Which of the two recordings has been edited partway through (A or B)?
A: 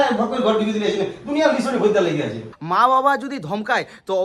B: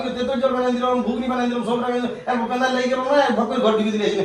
A